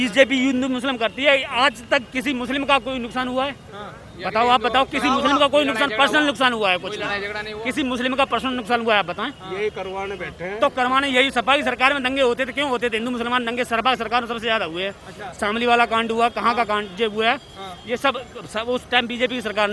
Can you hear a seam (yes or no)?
no